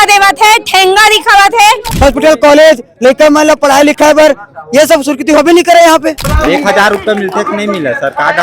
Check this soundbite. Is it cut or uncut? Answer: cut